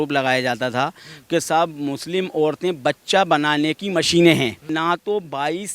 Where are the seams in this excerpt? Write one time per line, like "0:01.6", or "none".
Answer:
0:04.7